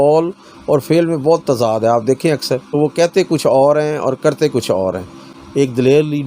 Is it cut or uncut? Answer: cut